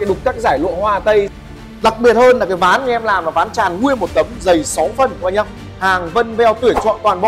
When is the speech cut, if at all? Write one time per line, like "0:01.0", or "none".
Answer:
0:01.5